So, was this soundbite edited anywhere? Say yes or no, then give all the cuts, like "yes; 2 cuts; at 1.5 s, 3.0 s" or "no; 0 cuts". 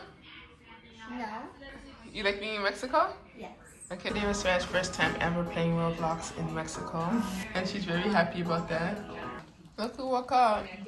yes; 3 cuts; at 4.1 s, 7.4 s, 9.4 s